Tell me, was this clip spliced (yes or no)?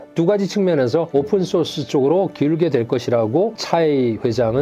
yes